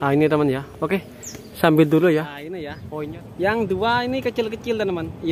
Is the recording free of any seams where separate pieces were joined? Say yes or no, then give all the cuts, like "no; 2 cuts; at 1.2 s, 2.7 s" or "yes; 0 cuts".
no; 1 cut; at 2.7 s